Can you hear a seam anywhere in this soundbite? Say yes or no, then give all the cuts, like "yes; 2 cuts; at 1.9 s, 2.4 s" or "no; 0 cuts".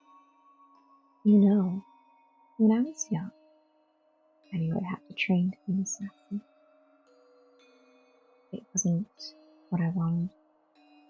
yes; 3 cuts; at 1.2 s, 6.5 s, 8.5 s